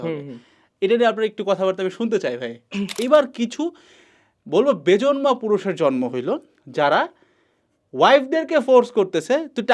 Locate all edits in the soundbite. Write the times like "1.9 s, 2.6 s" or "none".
2.9 s